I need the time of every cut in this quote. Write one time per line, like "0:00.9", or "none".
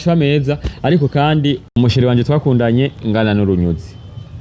0:01.7